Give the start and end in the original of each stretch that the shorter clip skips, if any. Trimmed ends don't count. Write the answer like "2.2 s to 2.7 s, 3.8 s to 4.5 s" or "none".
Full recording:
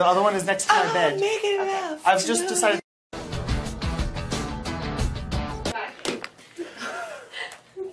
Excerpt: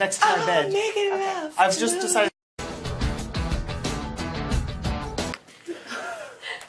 5.7 s to 6.2 s